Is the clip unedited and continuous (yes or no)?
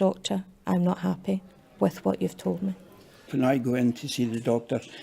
no